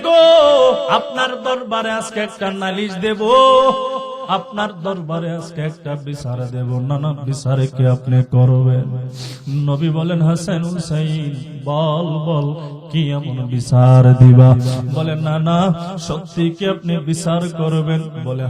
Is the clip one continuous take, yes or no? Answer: no